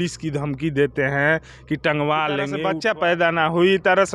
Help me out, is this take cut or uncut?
cut